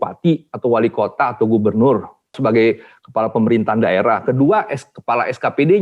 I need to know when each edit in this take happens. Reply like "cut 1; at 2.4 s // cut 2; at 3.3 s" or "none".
cut 1; at 2.3 s

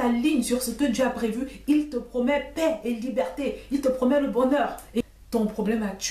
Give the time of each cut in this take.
cut 1; at 5.0 s

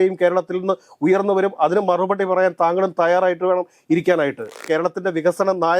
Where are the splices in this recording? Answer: cut 1; at 4.6 s

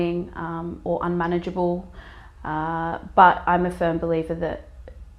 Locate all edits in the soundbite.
none

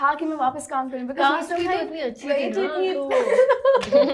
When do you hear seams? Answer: none

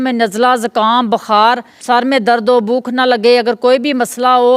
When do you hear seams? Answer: cut 1; at 1.7 s

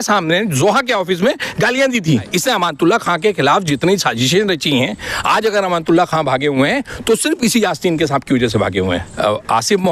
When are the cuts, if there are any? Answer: cut 1; at 2.3 s // cut 2; at 9.1 s

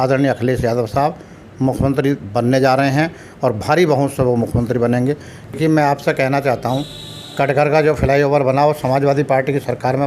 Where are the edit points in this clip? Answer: cut 1; at 5.5 s

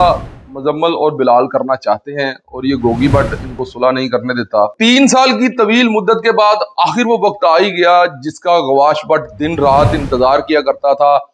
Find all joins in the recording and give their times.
cut 1; at 4.7 s

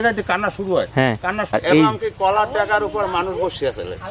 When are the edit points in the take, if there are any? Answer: cut 1; at 1.5 s

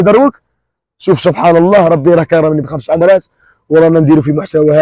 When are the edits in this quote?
none

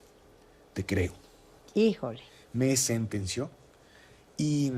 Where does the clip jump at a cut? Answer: none

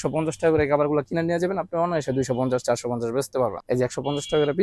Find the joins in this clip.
cut 1; at 3.6 s

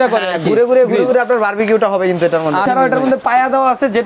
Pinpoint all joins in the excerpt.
cut 1; at 2.6 s

